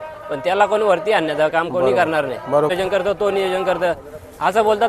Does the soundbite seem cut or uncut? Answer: cut